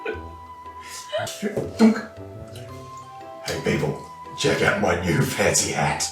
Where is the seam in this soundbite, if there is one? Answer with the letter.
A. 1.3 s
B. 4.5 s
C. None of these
A